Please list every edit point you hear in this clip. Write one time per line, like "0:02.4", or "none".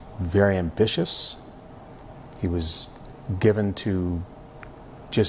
0:01.1

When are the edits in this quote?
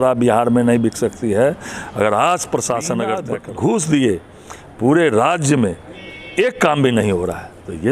0:03.2

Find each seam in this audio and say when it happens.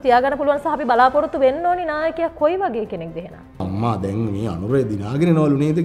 0:03.6

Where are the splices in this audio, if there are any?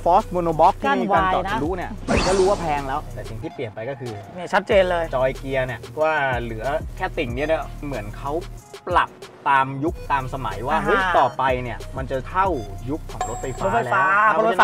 0:03.0
0:07.8

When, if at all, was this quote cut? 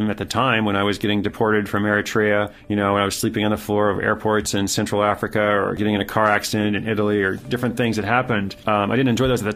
0:02.6
0:05.8
0:08.5

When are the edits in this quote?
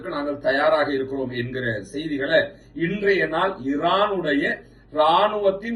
none

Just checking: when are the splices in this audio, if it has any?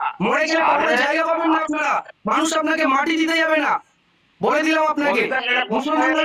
none

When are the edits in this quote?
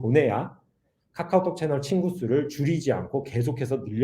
none

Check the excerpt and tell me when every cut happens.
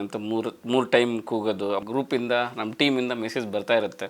0:01.8

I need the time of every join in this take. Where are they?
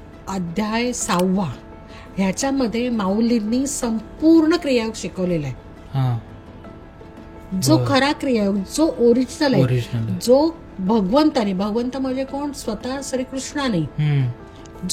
none

